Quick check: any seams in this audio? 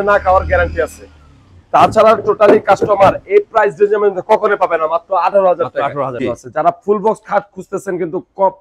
yes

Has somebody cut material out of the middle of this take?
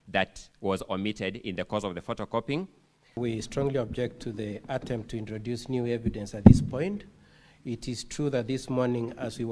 yes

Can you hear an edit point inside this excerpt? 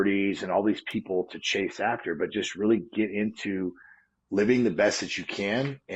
no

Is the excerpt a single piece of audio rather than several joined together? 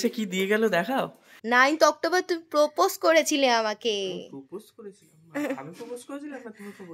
no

